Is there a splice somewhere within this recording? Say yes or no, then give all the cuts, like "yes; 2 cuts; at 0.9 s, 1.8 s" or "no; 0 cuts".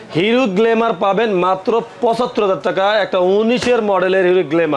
no; 0 cuts